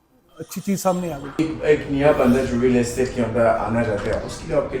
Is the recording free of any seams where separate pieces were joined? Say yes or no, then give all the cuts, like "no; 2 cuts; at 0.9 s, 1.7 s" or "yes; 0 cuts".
no; 1 cut; at 1.2 s